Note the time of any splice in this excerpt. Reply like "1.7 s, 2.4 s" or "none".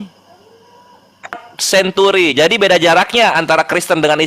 1.5 s